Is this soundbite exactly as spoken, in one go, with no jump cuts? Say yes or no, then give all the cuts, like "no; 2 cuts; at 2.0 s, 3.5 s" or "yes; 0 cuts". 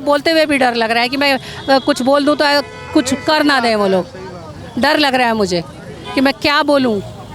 yes; 0 cuts